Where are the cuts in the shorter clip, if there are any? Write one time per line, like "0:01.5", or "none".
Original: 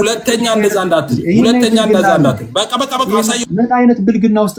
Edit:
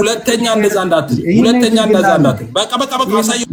none